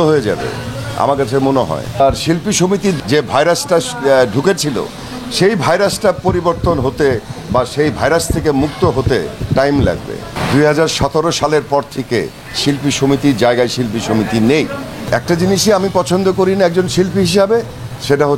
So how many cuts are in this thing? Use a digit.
5